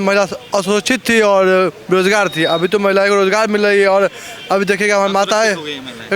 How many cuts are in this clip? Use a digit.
0